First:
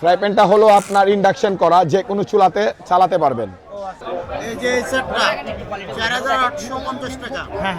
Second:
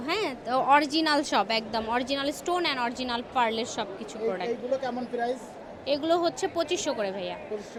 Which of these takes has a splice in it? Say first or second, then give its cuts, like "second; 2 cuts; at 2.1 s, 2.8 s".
first; 1 cut; at 4.0 s